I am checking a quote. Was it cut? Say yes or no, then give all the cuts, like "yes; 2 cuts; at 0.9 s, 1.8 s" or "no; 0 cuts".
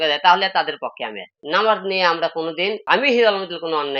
yes; 2 cuts; at 1.3 s, 2.8 s